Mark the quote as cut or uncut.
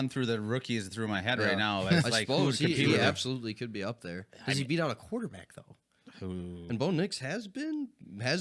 uncut